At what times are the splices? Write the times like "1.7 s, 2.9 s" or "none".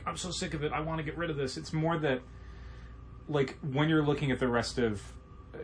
none

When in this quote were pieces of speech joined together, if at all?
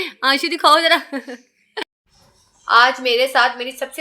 1.8 s

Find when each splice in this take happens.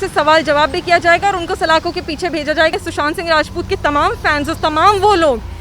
2.7 s

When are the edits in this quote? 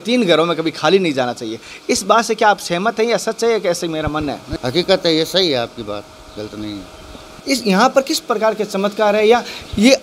4.5 s, 7.3 s

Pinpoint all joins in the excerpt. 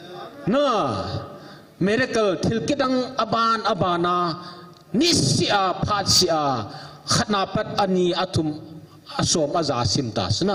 none

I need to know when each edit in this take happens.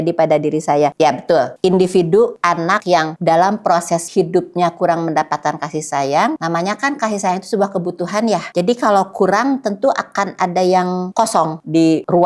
none

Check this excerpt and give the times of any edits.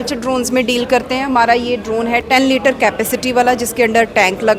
2.2 s

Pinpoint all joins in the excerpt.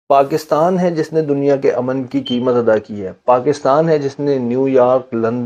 none

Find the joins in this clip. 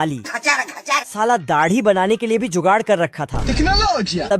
none

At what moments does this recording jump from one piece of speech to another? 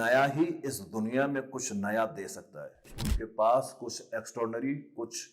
3.1 s

